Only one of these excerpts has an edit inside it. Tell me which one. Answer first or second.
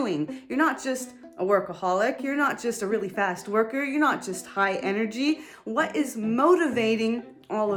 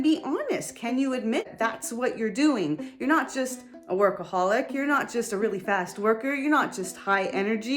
second